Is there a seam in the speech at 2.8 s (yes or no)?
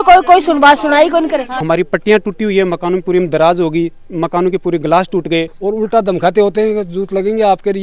no